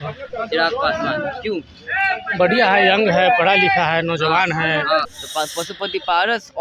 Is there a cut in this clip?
yes; 1 cut; at 5.2 s

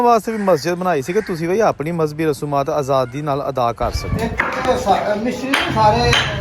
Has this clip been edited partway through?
yes; 1 cut; at 4.0 s

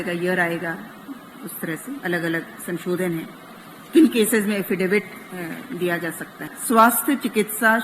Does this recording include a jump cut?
yes; 1 cut; at 6.5 s

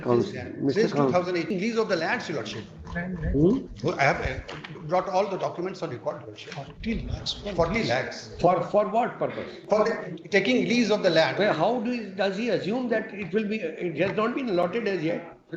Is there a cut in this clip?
yes; 1 cut; at 1.5 s

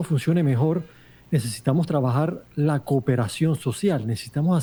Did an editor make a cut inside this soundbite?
no; 0 cuts

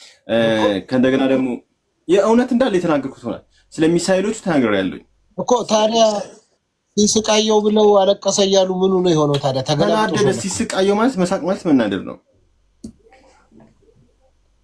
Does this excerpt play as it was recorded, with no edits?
yes; 0 cuts

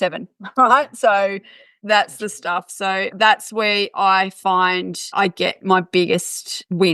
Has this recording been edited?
yes; 2 cuts; at 3.1 s, 5.1 s

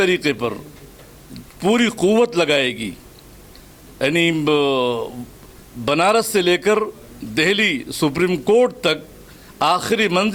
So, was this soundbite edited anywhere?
no; 0 cuts

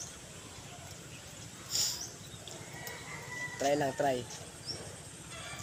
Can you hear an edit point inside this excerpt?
no; 0 cuts

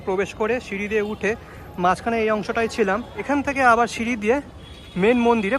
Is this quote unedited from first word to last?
no; 1 cut; at 3.2 s

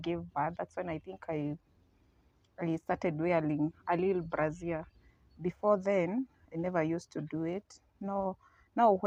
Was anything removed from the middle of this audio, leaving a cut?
no; 0 cuts

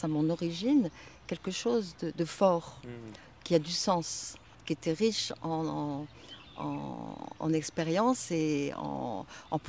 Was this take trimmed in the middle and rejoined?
no; 0 cuts

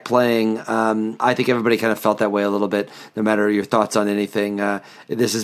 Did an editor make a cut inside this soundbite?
yes; 1 cut; at 1.2 s

